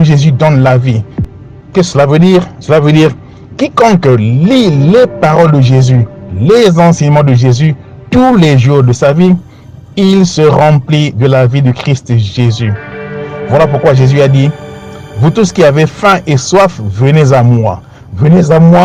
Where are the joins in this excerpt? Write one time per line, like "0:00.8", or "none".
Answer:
none